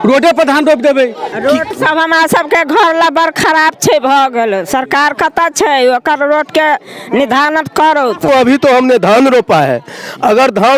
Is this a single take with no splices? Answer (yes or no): no